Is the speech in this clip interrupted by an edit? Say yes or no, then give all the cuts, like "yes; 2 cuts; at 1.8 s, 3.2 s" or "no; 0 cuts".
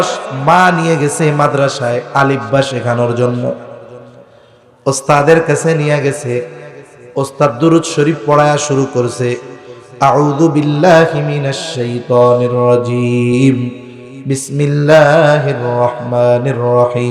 no; 0 cuts